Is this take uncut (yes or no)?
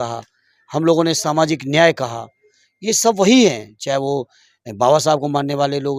yes